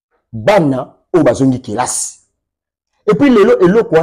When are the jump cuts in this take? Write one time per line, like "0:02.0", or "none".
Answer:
none